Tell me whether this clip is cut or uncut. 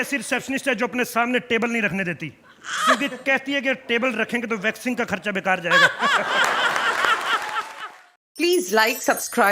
cut